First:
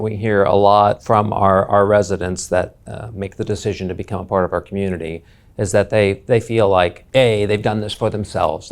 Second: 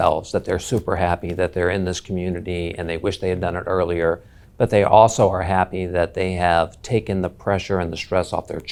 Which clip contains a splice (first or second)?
first